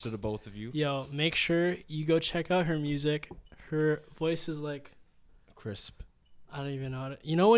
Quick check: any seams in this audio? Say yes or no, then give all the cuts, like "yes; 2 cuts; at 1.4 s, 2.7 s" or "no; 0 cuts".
no; 0 cuts